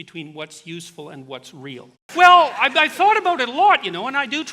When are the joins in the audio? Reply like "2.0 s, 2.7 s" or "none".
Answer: 2.0 s